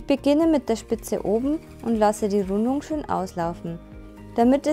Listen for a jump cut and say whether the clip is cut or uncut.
uncut